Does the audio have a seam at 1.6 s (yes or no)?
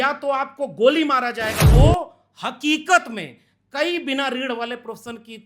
yes